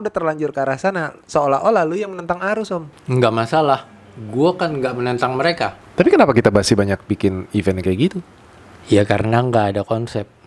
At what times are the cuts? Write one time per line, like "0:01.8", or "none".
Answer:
0:02.9
0:05.8